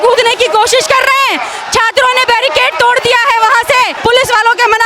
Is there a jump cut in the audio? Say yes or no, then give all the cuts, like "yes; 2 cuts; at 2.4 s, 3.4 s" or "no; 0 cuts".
yes; 1 cut; at 3.9 s